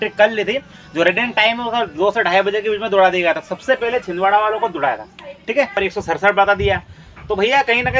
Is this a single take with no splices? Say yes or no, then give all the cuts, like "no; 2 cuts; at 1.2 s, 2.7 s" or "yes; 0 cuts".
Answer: no; 1 cut; at 5.7 s